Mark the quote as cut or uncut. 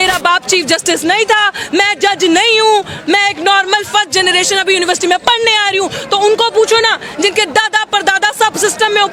uncut